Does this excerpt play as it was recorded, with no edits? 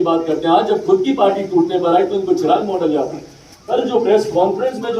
no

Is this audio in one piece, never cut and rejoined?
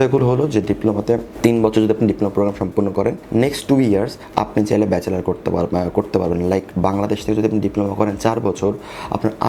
yes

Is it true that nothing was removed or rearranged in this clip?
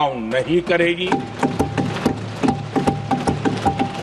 yes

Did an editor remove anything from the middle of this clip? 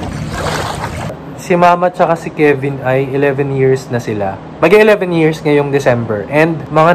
yes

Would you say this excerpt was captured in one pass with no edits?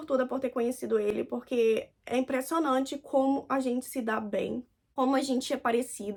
yes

